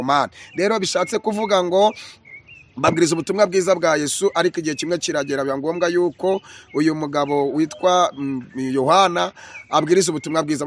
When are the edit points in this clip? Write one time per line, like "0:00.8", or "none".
none

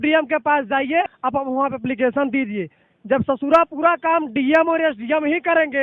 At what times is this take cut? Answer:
0:01.0

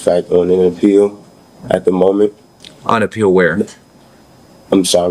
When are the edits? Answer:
none

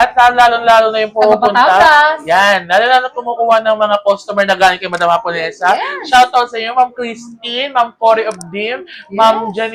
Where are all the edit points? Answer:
none

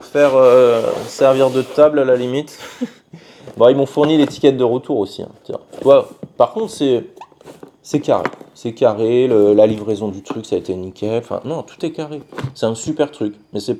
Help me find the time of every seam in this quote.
none

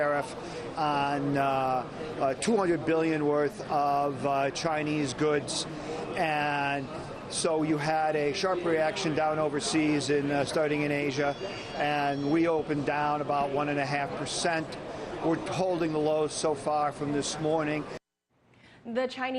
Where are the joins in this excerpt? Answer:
0:03.0

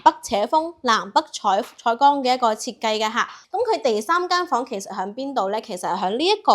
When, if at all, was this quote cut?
0:03.4

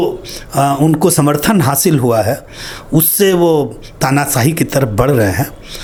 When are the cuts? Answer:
none

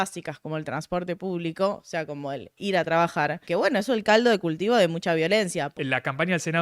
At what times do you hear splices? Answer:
0:03.4
0:05.6

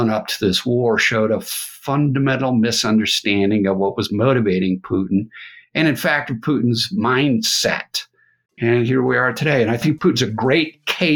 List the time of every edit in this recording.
0:08.4
0:09.8

